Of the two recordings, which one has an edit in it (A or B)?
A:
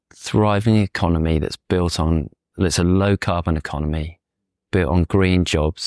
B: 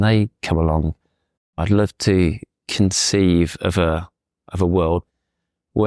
B